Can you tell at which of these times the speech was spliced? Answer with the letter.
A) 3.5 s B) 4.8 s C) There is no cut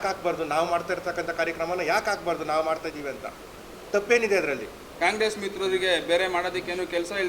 B